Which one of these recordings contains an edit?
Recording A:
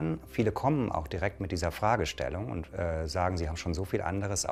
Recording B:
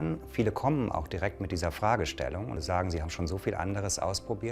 B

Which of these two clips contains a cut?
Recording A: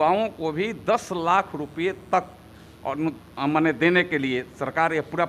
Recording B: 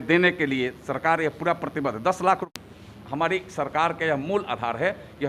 B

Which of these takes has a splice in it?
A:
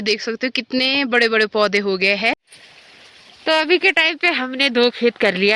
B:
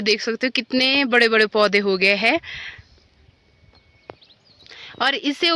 A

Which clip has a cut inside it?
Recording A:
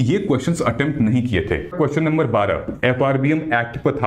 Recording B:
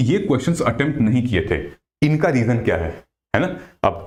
A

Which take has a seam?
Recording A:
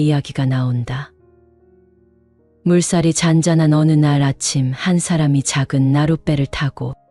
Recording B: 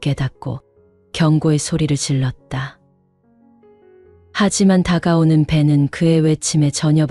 A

